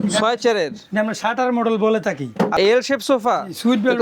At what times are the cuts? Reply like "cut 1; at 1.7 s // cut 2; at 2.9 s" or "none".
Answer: cut 1; at 2.5 s